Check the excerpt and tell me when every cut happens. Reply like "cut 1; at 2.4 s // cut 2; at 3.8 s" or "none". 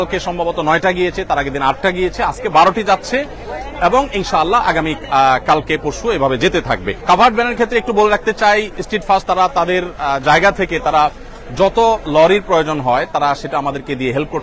none